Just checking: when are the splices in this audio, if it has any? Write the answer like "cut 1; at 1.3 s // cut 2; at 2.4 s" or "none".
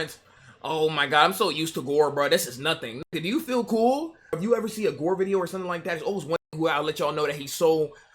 cut 1; at 4.4 s